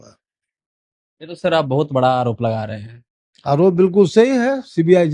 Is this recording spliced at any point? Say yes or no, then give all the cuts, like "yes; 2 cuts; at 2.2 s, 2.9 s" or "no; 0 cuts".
no; 0 cuts